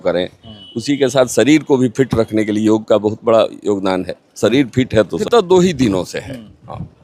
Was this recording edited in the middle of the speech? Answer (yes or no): yes